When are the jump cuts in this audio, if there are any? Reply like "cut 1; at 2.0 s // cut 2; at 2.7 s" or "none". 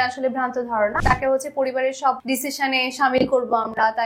cut 1; at 1.0 s // cut 2; at 2.2 s